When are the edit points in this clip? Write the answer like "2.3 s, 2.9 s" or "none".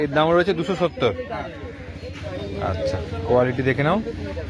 none